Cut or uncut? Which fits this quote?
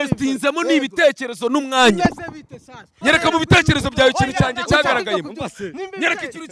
cut